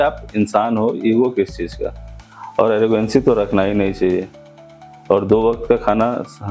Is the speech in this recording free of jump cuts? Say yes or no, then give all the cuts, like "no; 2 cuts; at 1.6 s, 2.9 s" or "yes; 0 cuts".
yes; 0 cuts